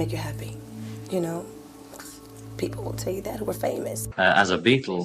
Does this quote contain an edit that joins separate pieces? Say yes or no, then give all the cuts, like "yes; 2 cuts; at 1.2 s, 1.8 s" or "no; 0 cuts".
yes; 1 cut; at 4.0 s